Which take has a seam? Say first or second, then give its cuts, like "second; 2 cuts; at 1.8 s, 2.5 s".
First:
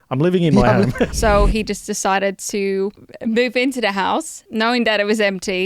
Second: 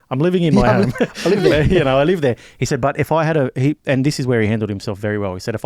first; 3 cuts; at 1.1 s, 3.1 s, 4.4 s